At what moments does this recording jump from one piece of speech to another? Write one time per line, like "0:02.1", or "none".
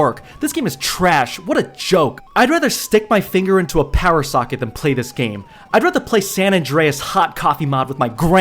0:02.2